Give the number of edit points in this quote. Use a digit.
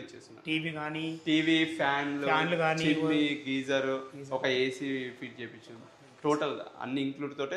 0